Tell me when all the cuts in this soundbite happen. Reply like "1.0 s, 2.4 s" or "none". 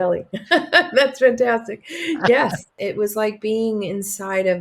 2.7 s